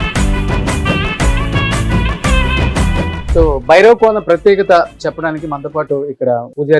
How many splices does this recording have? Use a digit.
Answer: 1